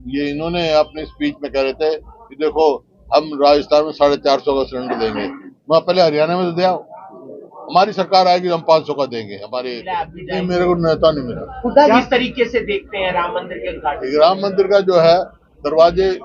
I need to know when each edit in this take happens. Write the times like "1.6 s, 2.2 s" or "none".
10.1 s